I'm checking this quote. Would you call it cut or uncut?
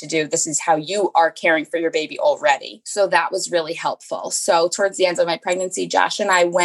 uncut